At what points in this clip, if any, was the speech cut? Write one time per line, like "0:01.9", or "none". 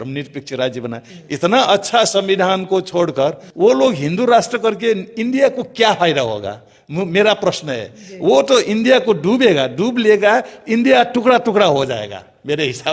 0:01.1